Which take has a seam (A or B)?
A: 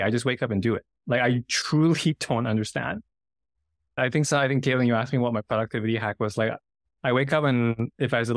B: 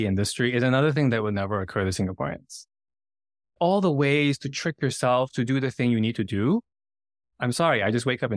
B